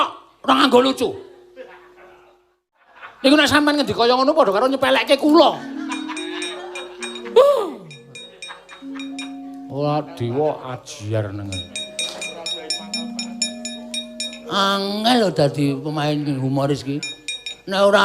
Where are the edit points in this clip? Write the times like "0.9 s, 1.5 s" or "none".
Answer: 2.8 s